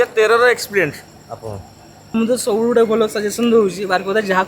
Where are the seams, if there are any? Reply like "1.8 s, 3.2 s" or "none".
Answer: none